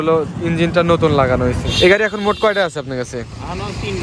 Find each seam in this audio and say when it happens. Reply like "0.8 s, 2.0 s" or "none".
1.7 s